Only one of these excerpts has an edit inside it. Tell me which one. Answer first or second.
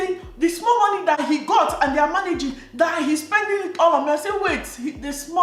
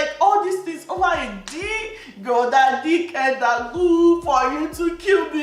first